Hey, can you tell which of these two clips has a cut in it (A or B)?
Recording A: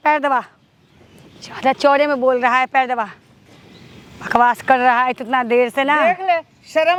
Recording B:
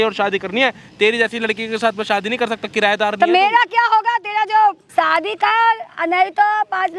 B